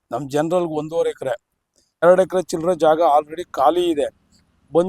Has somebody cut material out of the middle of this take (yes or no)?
yes